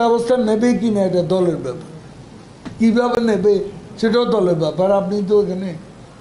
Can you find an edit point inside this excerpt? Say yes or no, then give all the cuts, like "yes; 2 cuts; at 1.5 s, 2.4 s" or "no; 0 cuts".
no; 0 cuts